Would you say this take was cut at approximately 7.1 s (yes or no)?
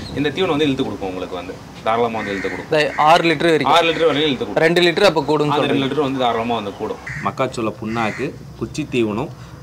yes